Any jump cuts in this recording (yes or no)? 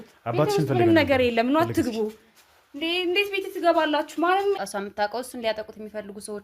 yes